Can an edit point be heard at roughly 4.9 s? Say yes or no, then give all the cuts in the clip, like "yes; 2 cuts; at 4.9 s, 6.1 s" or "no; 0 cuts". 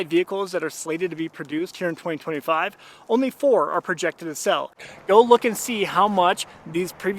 yes; 1 cut; at 4.9 s